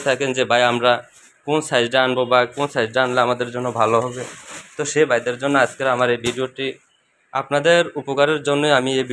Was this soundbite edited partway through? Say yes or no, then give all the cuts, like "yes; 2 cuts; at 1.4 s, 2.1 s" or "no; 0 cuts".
no; 0 cuts